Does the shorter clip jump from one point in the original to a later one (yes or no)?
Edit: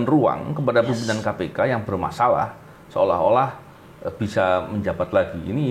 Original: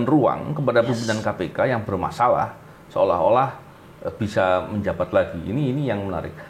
no